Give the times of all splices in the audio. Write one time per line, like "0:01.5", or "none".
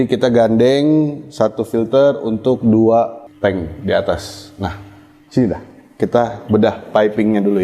0:03.2